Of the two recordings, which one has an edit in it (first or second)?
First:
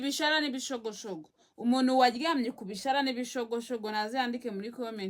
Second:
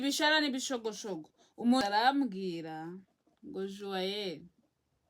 second